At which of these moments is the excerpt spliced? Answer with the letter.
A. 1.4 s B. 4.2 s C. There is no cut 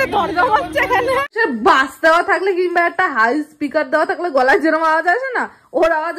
A